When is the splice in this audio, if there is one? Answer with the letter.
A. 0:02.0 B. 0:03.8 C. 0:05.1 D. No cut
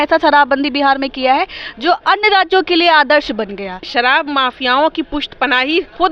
B